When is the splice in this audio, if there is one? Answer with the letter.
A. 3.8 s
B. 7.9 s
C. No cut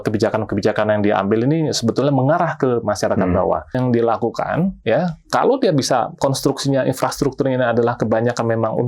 A